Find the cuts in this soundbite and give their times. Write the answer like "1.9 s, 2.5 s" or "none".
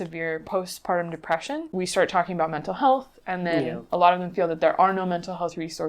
1.7 s